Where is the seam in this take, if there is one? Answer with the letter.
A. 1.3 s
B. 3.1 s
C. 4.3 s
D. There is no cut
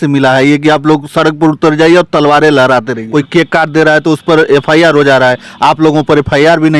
B